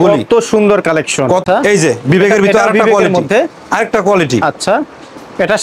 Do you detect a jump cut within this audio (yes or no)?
yes